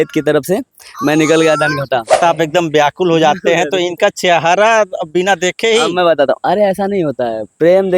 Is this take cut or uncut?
cut